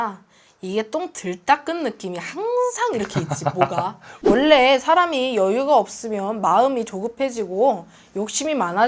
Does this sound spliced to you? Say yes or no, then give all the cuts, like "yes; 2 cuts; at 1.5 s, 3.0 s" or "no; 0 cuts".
yes; 1 cut; at 4.1 s